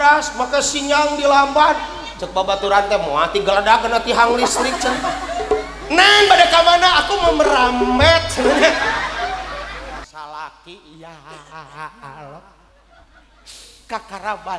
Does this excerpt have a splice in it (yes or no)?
yes